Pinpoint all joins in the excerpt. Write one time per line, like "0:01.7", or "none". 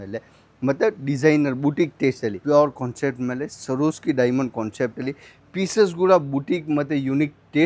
0:02.4